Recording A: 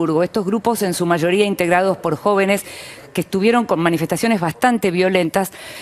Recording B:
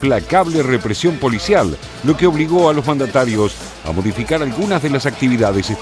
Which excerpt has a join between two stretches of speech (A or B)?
B